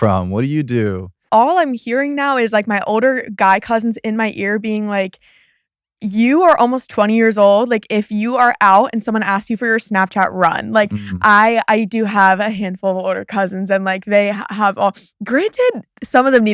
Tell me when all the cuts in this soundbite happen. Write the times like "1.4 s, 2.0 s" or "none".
1.2 s